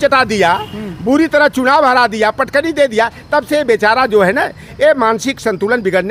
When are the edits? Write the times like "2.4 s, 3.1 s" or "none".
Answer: none